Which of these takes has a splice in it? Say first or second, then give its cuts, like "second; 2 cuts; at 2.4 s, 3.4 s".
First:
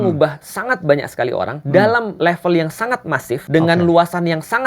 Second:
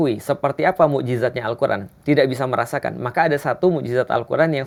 first; 3 cuts; at 1.6 s, 2.1 s, 3.4 s